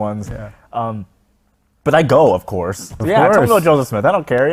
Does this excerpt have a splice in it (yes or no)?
no